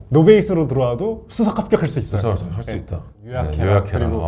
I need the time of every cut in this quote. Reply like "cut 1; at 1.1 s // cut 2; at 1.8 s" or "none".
cut 1; at 3.2 s